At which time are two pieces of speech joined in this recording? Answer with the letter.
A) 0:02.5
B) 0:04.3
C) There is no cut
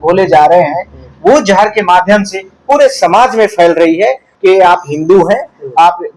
B